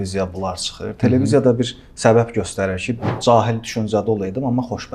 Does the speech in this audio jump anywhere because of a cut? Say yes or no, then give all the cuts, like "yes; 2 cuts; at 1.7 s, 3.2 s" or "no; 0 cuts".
yes; 1 cut; at 3.2 s